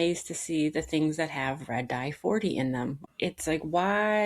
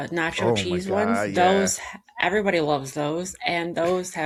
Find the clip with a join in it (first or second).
first